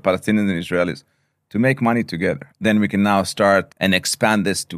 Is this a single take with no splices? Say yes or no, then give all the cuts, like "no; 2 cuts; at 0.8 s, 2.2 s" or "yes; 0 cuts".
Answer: no; 2 cuts; at 2.5 s, 3.7 s